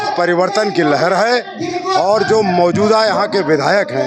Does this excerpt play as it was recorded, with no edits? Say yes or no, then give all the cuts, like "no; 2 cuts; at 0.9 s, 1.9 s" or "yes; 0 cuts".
yes; 0 cuts